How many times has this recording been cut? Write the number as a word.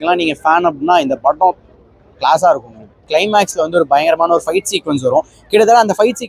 one